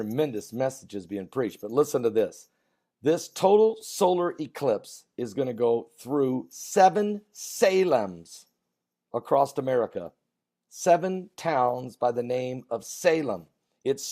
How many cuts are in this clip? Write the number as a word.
one